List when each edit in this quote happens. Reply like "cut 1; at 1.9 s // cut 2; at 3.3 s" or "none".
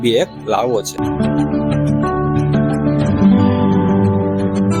none